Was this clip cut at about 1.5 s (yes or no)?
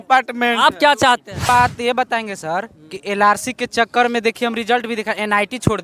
yes